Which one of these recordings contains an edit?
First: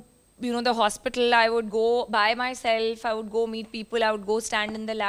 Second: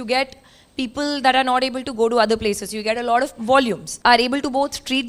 second; 1 cut; at 3.9 s

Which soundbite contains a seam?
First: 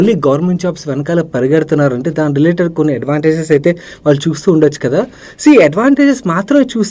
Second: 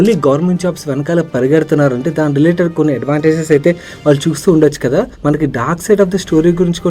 second; 1 cut; at 5.1 s

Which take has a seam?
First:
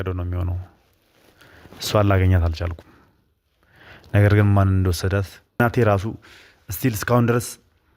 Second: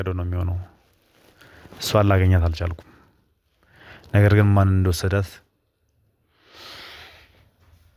first; 1 cut; at 5.6 s

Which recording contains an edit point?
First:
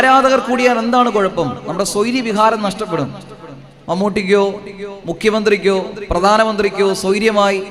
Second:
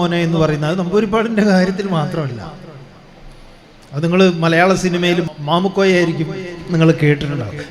second; 1 cut; at 5.3 s

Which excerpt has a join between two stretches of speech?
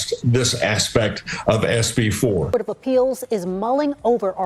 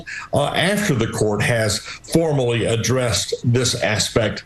first; 1 cut; at 2.5 s

